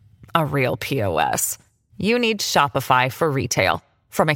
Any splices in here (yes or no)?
no